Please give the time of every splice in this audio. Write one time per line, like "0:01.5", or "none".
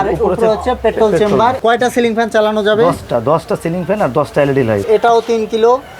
0:01.6
0:04.9